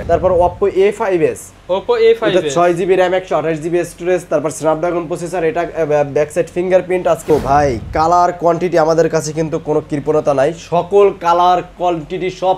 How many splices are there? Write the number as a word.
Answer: one